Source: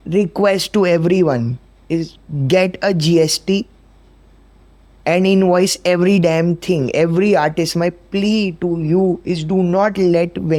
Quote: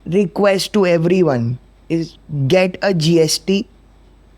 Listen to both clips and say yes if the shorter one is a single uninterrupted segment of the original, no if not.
yes